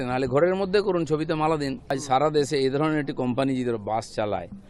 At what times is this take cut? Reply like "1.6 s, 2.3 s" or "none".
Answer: 1.9 s